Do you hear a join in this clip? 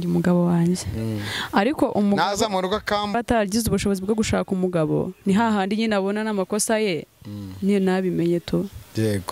yes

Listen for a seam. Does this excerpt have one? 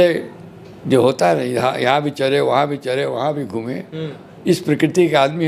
no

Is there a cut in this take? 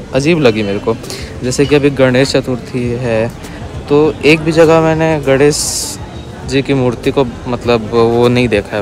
no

